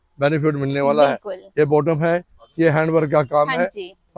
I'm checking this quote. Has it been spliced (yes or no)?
no